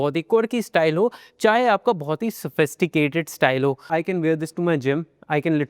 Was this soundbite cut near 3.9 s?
yes; 1 cut; at 3.9 s

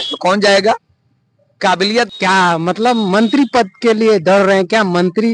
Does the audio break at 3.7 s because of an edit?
no; 1 cut; at 2.1 s

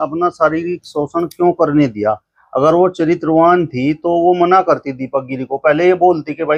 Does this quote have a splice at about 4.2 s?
no; 0 cuts

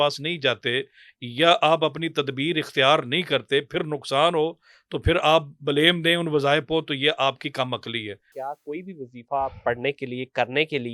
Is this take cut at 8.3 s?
yes; 1 cut; at 8.3 s

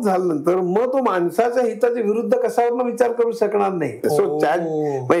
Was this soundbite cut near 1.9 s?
no; 1 cut; at 4.0 s

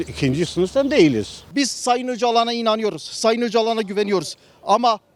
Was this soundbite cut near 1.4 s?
yes; 1 cut; at 1.4 s

